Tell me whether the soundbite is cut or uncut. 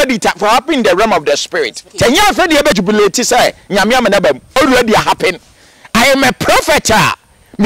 cut